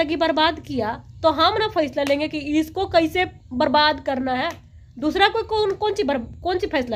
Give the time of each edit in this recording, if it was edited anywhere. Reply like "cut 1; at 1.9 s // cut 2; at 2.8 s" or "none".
none